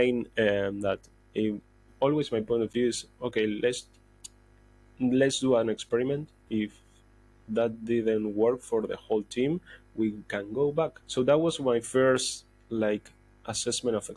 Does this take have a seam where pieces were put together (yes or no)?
yes